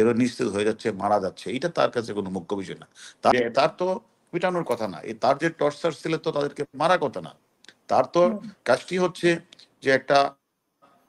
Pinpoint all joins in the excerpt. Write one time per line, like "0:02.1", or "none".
0:03.3